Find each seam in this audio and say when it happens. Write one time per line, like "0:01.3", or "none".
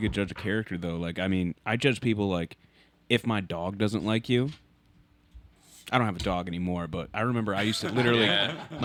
none